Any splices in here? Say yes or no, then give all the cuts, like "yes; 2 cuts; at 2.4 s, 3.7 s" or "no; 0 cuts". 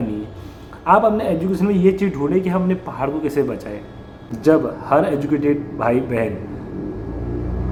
no; 0 cuts